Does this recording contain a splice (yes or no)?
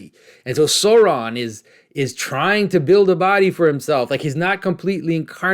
no